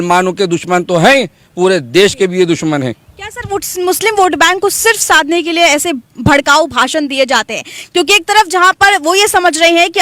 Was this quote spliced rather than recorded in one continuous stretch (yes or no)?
no